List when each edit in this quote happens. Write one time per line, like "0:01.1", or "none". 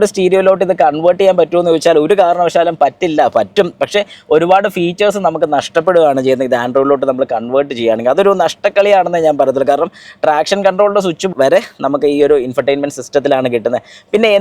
none